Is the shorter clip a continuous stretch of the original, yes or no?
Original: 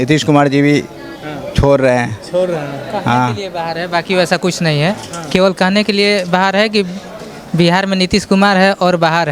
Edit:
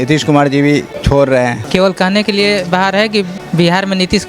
no